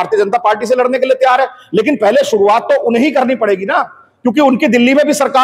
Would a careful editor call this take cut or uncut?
uncut